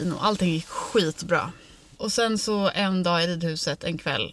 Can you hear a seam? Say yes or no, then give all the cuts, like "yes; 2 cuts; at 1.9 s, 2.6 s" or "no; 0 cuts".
no; 0 cuts